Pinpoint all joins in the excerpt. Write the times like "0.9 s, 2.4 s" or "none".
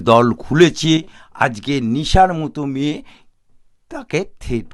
1.2 s